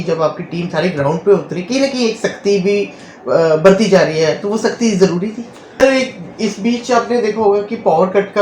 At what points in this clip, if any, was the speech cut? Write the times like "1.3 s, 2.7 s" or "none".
5.8 s